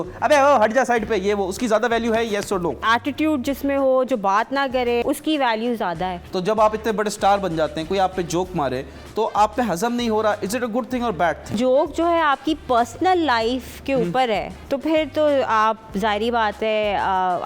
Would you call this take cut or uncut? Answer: cut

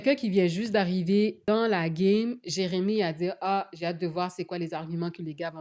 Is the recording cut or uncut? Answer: uncut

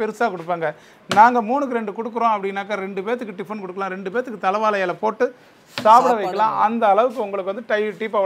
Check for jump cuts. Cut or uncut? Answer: uncut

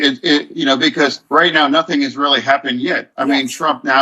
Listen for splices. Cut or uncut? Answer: cut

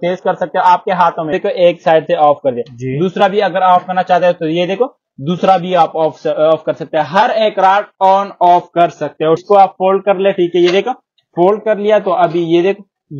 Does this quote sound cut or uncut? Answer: cut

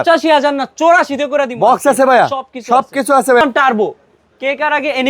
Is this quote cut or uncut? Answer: cut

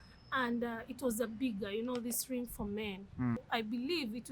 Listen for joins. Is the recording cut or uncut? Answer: cut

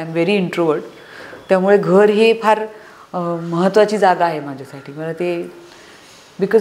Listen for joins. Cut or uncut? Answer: uncut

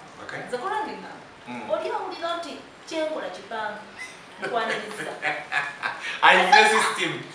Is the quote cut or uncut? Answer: uncut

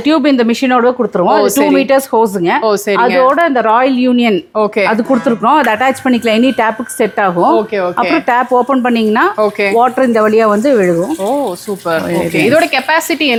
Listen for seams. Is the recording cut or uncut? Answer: uncut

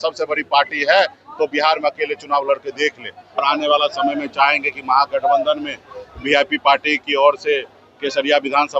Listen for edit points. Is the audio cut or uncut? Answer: cut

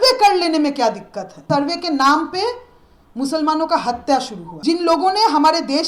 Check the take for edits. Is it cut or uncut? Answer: cut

